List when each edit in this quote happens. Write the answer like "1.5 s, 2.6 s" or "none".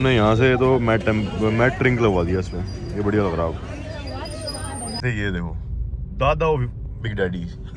5.0 s